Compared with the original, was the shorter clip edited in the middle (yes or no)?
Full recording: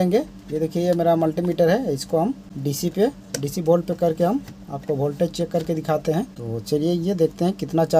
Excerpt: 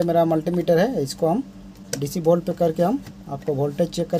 yes